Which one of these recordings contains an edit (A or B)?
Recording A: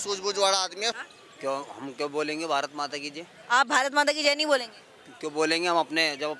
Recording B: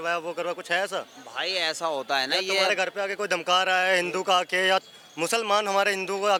A